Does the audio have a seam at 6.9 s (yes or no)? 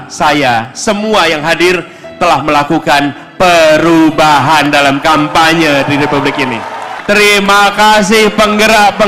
yes